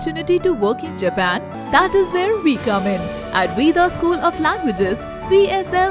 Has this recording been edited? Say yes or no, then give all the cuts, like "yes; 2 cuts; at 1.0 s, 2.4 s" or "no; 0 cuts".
yes; 1 cut; at 1.5 s